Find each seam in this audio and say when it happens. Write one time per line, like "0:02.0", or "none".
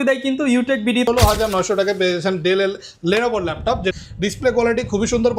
0:01.1
0:03.9